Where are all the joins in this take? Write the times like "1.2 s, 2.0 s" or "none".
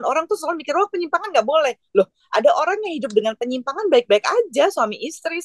none